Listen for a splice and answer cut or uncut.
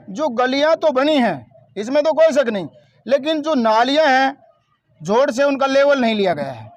uncut